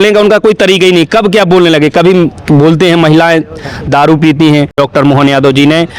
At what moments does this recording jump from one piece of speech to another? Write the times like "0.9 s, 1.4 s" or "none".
4.8 s